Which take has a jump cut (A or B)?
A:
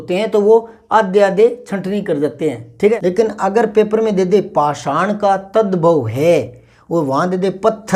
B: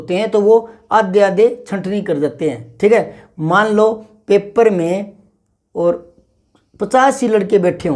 A